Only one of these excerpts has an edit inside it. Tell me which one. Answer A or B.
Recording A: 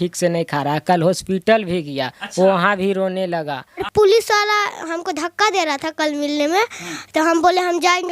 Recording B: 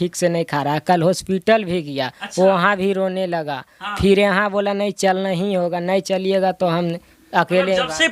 A